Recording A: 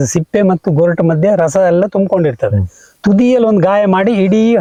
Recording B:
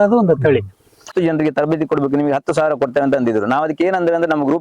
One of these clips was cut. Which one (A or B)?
B